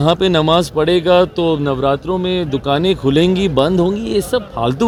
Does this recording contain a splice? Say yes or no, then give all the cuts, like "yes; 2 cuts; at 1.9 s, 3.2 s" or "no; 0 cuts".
no; 0 cuts